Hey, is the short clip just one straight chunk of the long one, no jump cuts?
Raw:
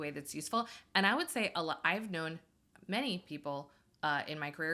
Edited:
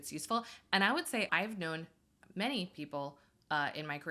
no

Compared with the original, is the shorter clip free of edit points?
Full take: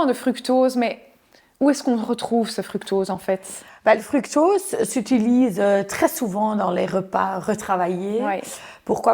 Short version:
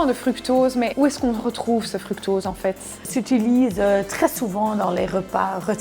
no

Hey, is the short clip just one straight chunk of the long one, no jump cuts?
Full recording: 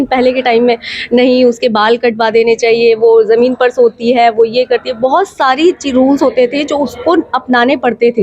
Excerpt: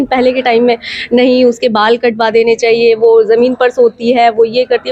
yes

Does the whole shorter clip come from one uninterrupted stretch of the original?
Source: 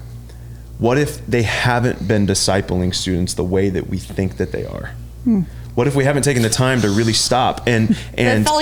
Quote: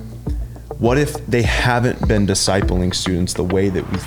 yes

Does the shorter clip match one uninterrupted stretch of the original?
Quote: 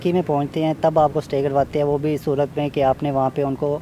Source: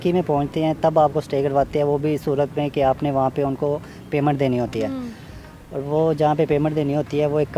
yes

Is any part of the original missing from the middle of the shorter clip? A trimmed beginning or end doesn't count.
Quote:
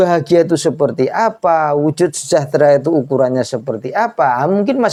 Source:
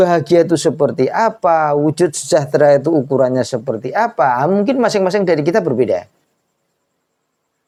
no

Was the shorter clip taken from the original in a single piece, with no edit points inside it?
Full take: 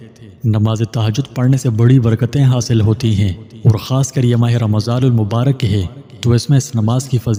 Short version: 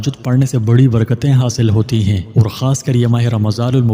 no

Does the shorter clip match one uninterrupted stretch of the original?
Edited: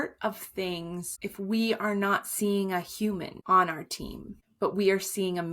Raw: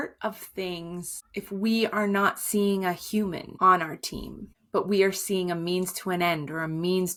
no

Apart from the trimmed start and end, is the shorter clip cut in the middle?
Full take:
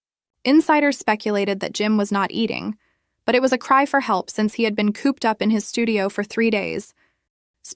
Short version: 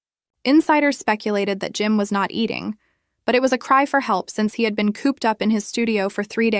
no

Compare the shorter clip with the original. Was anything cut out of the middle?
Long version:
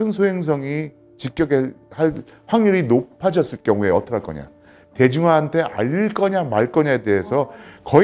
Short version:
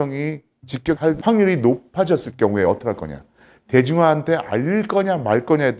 yes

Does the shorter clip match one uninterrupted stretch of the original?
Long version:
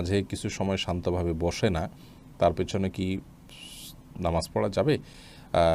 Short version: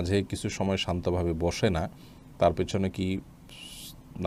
yes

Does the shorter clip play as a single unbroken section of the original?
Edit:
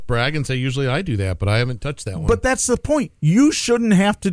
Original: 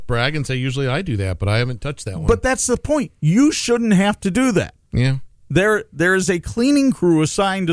yes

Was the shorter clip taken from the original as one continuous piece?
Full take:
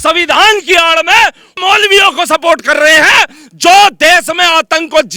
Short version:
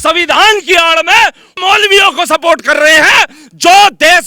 yes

